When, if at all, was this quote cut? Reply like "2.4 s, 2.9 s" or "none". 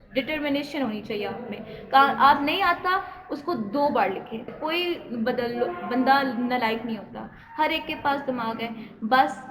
4.5 s